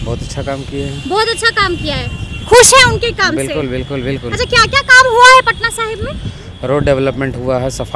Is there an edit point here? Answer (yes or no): no